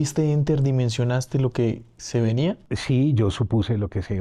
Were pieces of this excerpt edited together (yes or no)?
no